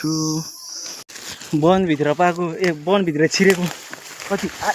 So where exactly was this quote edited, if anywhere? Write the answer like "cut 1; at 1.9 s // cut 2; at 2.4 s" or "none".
cut 1; at 1.0 s